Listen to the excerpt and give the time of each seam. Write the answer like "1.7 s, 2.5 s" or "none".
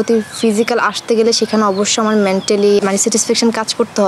2.8 s

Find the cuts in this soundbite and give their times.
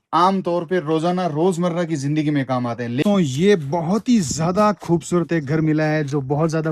3.0 s

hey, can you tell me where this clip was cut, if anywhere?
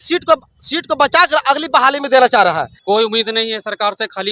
2.7 s

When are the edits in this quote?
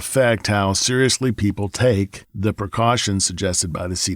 2.2 s

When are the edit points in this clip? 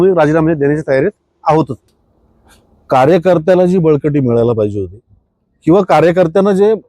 1.8 s

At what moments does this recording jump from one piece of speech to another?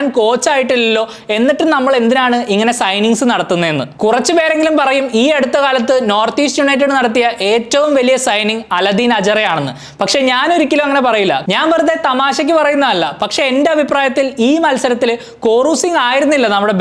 3.9 s, 11.4 s

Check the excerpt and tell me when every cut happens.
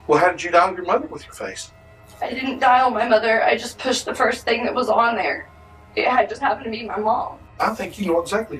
7.4 s

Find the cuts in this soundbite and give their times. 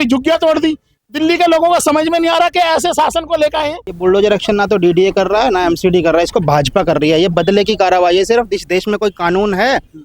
3.8 s

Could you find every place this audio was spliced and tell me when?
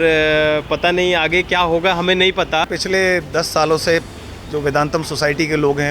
2.7 s

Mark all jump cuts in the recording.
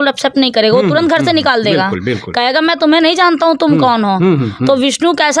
none

